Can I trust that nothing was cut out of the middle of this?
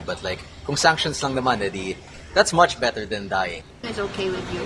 no; 1 cut; at 3.7 s

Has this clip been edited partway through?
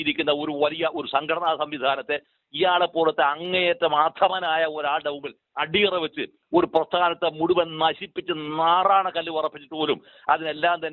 no; 0 cuts

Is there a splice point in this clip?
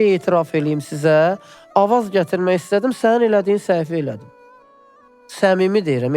no; 0 cuts

